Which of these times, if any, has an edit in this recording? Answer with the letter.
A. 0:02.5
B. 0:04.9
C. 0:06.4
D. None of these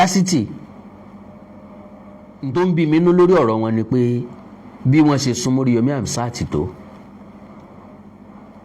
A